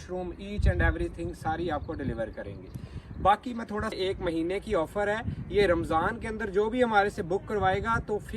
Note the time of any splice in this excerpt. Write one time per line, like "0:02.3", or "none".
0:03.9

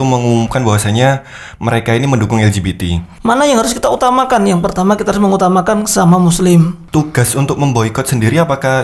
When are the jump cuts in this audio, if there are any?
0:03.1
0:06.8

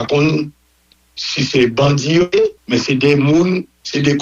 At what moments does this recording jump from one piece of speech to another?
0:02.3

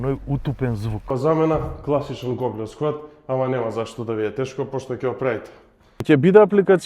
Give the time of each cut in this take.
0:01.1
0:06.0

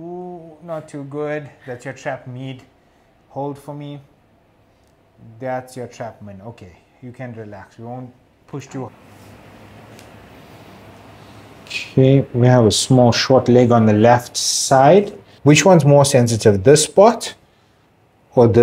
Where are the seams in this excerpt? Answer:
0:08.9
0:15.3

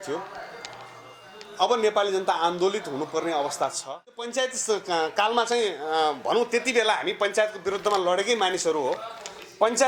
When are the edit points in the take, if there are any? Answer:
0:04.2

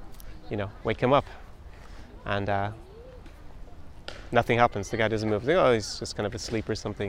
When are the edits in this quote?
none

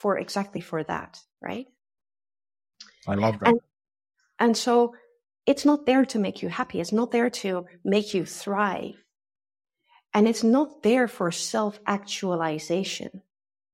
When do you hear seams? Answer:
none

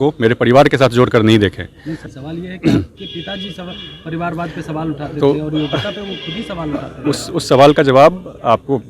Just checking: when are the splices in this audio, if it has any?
0:02.1

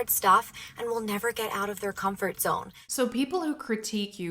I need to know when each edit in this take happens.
none

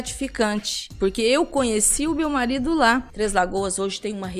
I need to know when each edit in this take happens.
0:03.1

